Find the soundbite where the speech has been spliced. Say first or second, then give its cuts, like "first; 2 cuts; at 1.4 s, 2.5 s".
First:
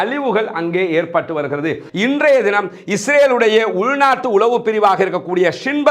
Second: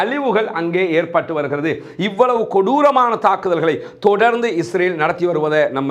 first; 1 cut; at 1.8 s